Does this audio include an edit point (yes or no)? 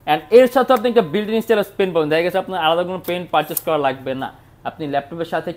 no